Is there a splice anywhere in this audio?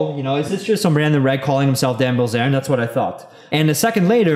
yes; 1 cut; at 3.3 s

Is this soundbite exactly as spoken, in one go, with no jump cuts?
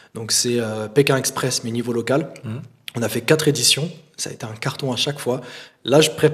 yes; 0 cuts

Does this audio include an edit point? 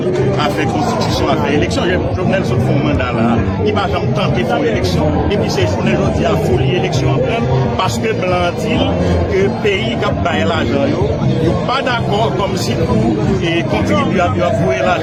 no; 0 cuts

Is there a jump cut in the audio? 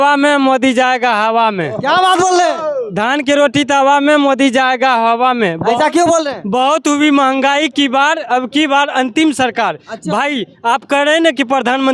no; 0 cuts

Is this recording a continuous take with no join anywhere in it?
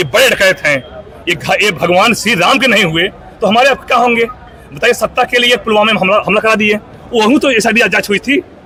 yes; 0 cuts

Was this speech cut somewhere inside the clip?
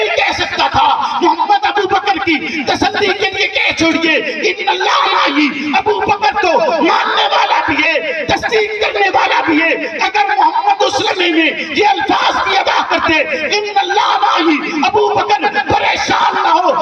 no; 0 cuts

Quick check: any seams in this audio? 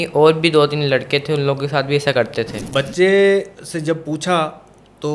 yes; 1 cut; at 2.6 s

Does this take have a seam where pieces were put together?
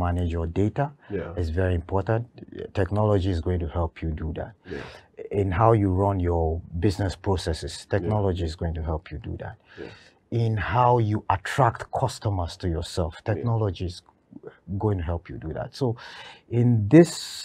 no; 0 cuts

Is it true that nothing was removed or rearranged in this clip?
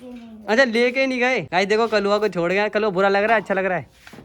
no; 1 cut; at 1.4 s

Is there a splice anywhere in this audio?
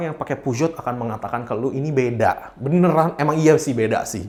no; 0 cuts

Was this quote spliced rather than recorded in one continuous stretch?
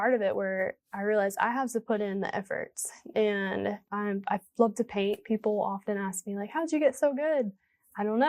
yes; 1 cut; at 3.8 s

